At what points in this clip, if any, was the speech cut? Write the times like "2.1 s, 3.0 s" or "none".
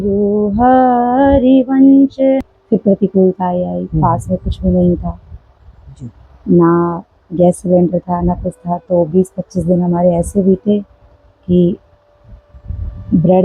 2.4 s